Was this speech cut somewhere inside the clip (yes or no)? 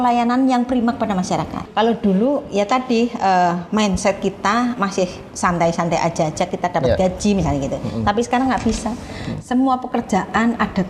yes